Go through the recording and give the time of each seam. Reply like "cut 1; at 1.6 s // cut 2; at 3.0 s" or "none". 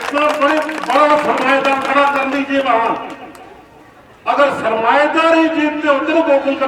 none